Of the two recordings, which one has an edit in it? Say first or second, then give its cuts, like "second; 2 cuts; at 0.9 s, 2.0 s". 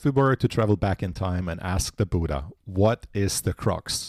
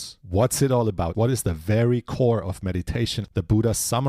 second; 2 cuts; at 1.1 s, 3.2 s